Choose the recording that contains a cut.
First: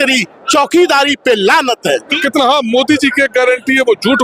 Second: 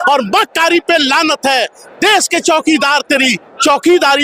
first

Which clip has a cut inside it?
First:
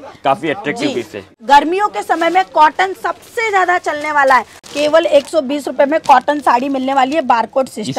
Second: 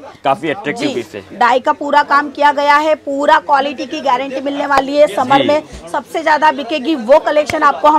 first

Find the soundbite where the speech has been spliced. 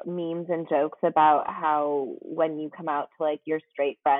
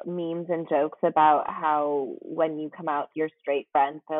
second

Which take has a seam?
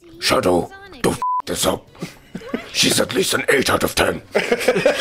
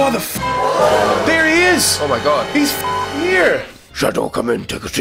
second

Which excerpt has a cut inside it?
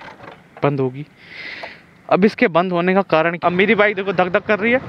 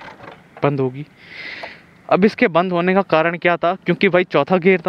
first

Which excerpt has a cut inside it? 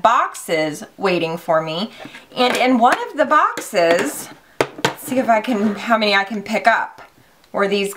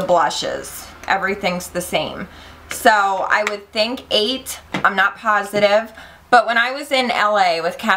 second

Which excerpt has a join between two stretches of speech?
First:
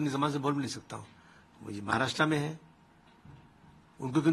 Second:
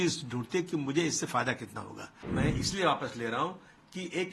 second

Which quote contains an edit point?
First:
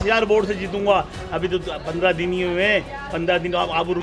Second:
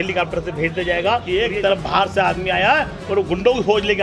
second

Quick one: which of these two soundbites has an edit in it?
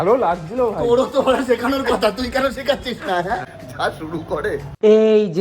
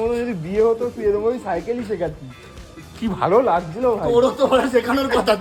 first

